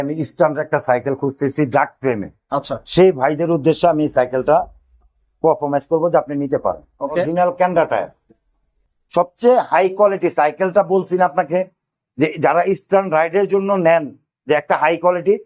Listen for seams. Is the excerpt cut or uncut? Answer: cut